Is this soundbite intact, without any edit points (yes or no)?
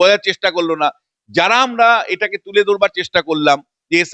yes